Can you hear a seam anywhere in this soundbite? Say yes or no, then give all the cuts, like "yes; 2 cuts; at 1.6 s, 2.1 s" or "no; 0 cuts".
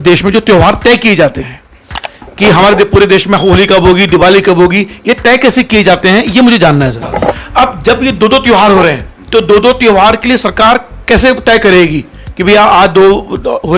yes; 1 cut; at 7.1 s